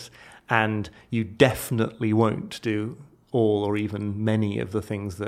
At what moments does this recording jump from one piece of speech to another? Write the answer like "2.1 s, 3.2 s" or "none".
none